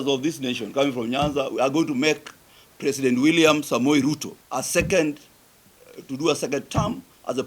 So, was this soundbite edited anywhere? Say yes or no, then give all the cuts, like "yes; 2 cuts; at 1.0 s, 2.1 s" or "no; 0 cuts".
yes; 1 cut; at 4.4 s